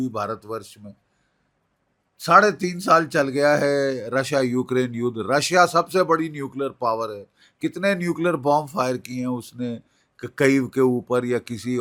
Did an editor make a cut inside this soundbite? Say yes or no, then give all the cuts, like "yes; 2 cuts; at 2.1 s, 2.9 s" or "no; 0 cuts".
no; 0 cuts